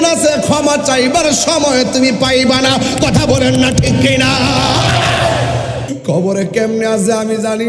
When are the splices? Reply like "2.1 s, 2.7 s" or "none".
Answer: 5.9 s

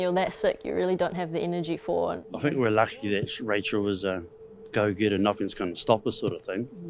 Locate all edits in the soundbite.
2.3 s

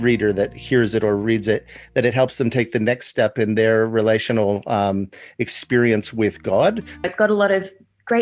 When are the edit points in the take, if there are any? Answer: 7.0 s

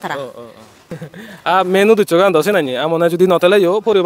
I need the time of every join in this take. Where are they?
0.9 s

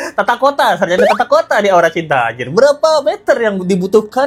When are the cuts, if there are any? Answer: none

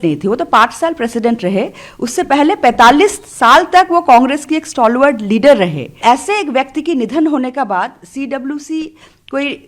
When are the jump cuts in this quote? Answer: 5.9 s

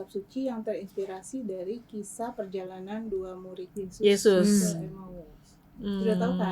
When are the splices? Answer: 3.6 s

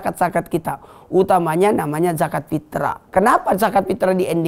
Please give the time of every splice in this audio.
3.0 s

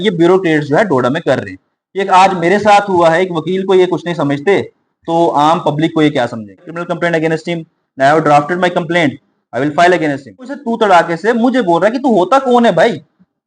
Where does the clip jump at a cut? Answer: 6.8 s, 10.6 s

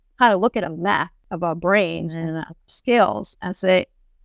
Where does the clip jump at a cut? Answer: 1.2 s, 2.1 s

